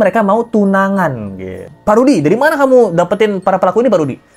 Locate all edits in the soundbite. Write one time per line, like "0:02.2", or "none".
0:01.7